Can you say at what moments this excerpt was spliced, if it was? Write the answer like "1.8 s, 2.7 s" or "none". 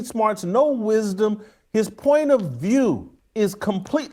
3.2 s